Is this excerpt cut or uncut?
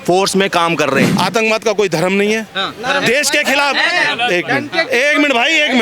cut